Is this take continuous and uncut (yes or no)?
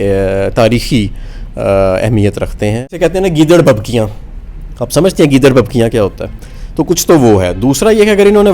no